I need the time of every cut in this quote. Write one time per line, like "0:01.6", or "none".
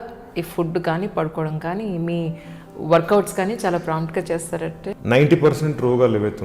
0:04.8